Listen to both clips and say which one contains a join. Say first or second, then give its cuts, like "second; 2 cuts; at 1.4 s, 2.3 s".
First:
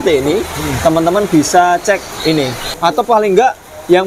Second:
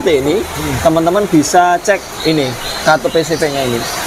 first; 1 cut; at 2.7 s